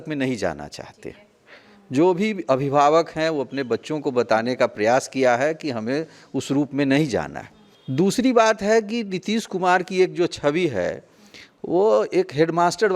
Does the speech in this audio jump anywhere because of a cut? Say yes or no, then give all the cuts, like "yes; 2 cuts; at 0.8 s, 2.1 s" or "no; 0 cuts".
no; 0 cuts